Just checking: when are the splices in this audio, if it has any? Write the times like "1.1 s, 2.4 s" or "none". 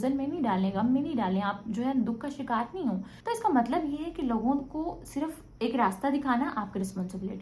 3.1 s, 5.4 s